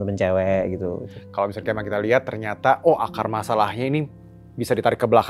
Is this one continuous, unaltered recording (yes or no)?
no